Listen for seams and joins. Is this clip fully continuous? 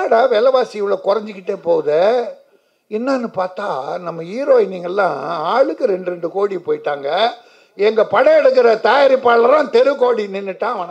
yes; 0 cuts

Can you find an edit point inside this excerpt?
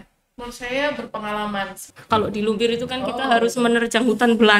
yes; 1 cut; at 1.9 s

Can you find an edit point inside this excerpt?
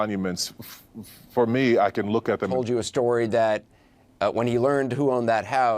yes; 1 cut; at 2.5 s

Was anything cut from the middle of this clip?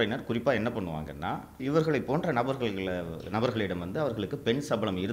yes; 1 cut; at 1.6 s

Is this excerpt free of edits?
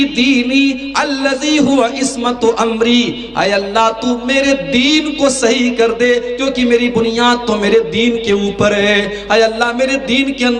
yes; 0 cuts

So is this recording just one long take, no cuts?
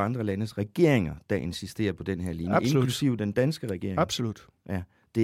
yes; 0 cuts

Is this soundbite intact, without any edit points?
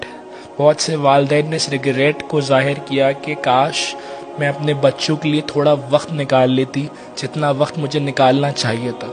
yes; 0 cuts

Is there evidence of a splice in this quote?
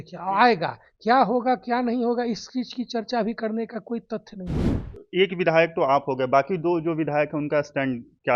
yes; 1 cut; at 4.7 s

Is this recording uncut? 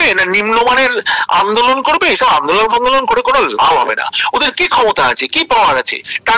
yes; 0 cuts

